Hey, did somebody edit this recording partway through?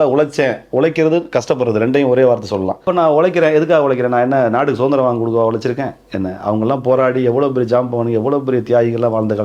yes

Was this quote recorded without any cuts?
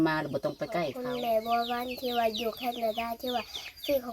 no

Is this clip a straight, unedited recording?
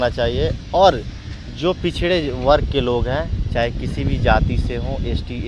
yes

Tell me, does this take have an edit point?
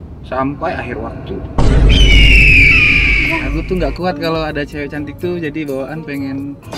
yes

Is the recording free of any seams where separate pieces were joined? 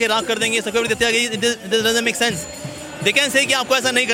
yes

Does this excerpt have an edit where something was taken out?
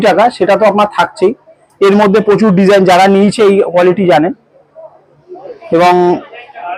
no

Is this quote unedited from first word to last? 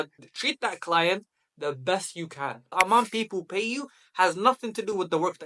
no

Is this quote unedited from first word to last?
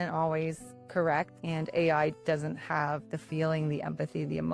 yes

